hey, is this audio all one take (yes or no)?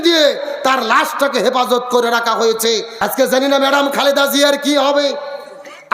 no